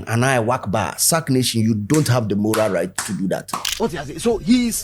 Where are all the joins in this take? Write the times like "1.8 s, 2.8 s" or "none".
3.6 s